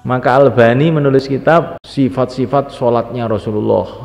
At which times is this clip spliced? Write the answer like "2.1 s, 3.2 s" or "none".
1.3 s